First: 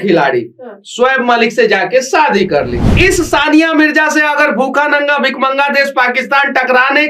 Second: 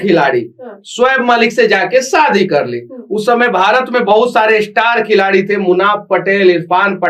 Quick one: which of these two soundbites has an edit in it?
first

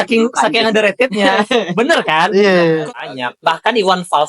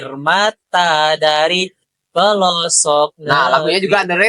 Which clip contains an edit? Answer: first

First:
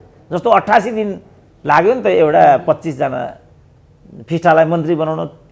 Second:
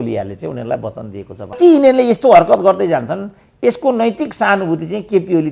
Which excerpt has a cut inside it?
second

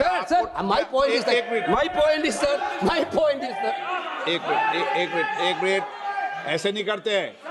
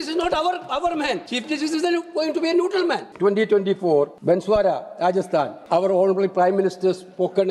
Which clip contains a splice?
second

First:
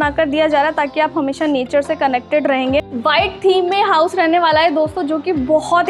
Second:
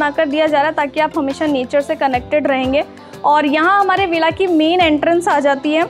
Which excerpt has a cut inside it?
first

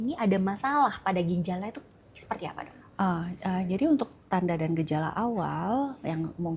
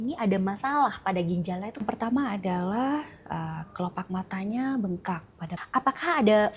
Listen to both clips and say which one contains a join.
second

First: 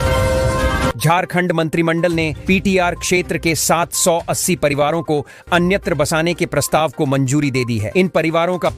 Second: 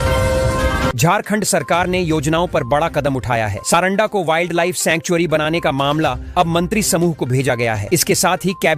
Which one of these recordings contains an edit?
second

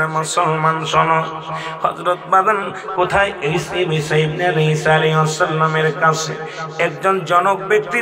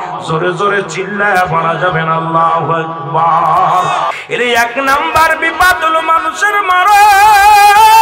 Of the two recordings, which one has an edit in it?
second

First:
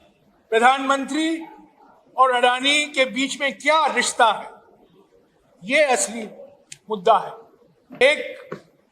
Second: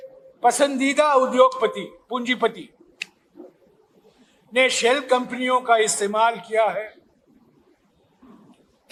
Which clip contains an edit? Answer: first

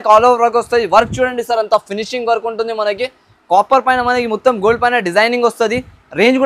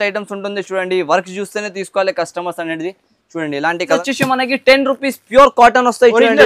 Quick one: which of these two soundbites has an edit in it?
second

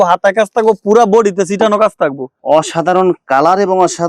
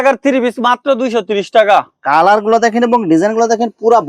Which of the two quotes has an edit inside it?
first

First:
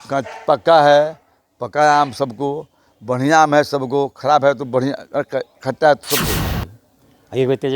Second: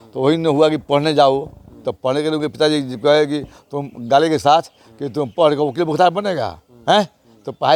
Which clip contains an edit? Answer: first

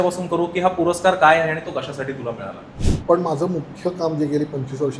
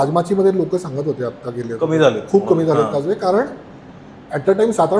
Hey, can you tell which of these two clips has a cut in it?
first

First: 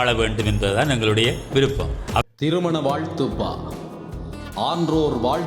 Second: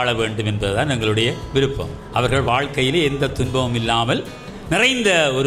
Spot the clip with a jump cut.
first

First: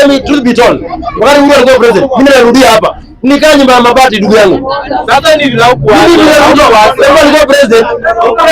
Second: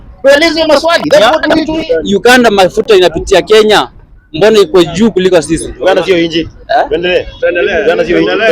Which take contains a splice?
second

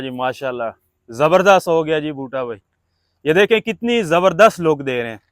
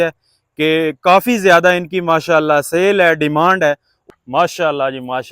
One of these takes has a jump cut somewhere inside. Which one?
second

